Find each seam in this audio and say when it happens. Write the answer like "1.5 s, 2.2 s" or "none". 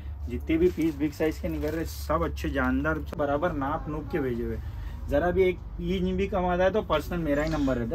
3.2 s

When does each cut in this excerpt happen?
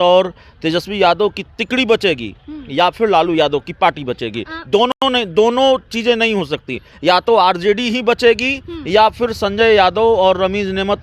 none

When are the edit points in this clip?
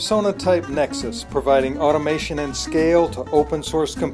none

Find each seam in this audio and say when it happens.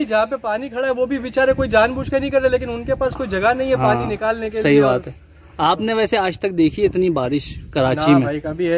none

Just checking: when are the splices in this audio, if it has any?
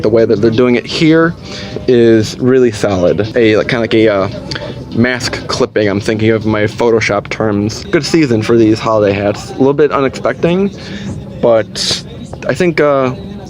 3.3 s, 7.8 s

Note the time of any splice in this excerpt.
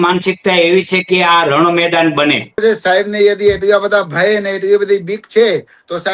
2.6 s

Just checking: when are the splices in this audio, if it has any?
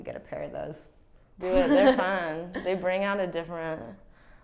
none

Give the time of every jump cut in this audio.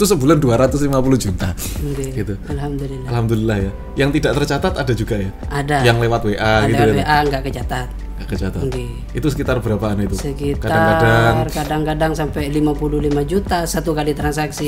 none

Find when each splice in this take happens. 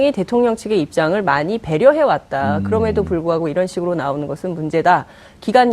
2.6 s

